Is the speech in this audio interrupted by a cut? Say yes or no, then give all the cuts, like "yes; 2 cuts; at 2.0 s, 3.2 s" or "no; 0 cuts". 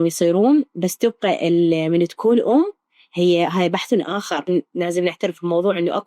yes; 1 cut; at 4.5 s